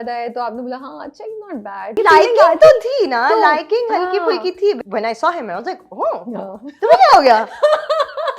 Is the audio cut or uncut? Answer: cut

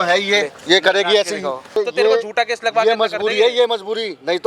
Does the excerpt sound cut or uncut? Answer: cut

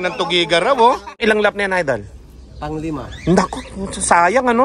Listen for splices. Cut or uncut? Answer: cut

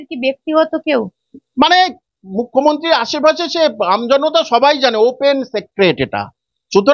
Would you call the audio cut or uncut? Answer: uncut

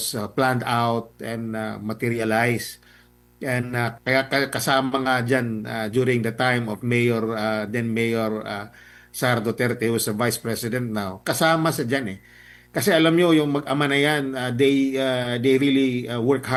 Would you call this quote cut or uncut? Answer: uncut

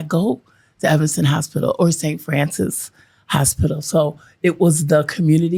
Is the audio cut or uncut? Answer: uncut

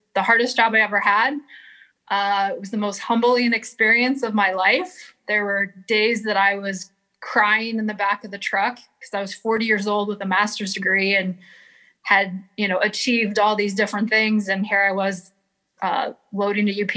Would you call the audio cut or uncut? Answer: uncut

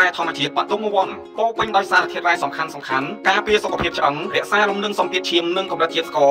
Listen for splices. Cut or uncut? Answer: uncut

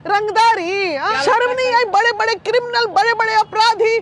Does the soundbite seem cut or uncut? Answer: cut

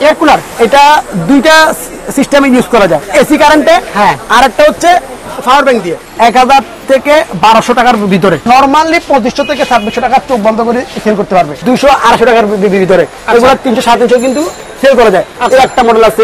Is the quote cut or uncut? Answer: cut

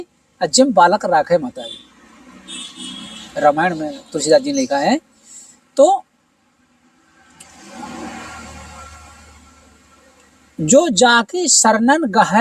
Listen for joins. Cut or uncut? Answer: uncut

